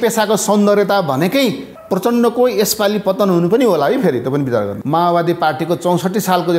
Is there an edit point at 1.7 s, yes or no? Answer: yes